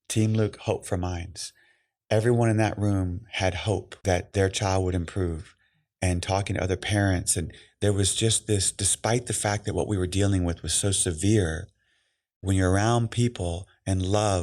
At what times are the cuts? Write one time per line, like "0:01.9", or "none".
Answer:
0:03.9